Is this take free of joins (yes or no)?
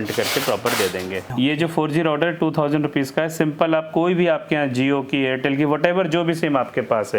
no